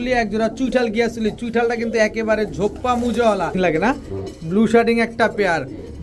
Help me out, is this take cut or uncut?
cut